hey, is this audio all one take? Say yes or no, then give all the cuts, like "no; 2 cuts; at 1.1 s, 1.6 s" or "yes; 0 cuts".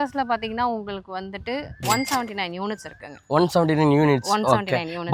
yes; 0 cuts